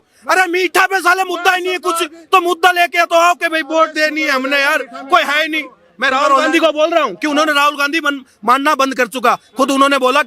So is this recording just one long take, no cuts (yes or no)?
yes